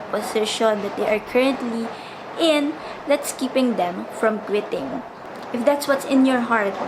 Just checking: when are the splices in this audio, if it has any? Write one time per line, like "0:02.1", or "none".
0:05.1